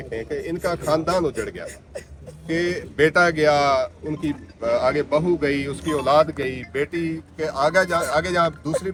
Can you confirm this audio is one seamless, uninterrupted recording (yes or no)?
yes